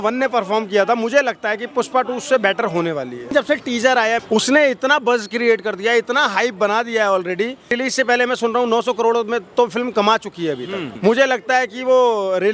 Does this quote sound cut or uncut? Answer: cut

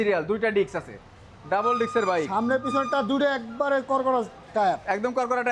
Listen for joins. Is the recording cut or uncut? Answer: uncut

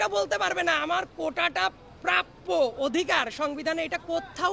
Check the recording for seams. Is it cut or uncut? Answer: uncut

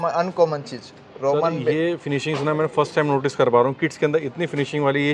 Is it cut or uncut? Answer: uncut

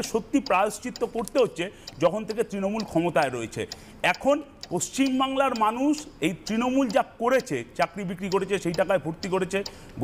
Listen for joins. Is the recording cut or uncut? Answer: uncut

